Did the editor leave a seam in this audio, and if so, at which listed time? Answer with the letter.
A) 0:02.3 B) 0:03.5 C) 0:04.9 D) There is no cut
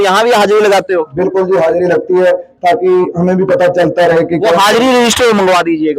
D